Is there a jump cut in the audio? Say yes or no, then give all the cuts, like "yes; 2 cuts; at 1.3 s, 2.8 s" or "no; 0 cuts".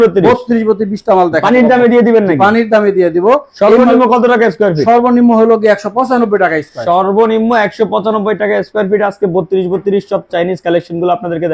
no; 0 cuts